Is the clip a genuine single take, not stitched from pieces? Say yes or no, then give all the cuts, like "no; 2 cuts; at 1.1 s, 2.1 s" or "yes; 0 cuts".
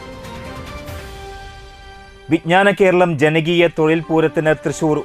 no; 1 cut; at 1.1 s